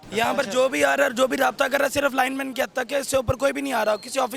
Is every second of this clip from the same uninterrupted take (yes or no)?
yes